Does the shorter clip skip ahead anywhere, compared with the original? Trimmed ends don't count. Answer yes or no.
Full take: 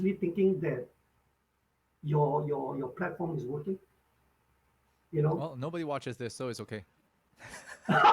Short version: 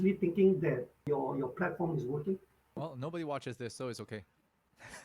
yes